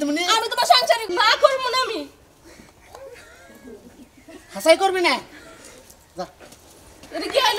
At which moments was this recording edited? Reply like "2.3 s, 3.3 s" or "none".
1.0 s